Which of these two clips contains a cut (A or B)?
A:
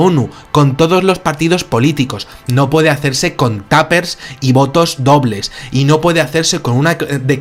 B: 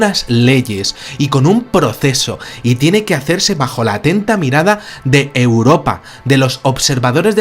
B